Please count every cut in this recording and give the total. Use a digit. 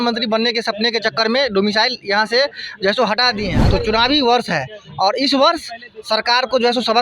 1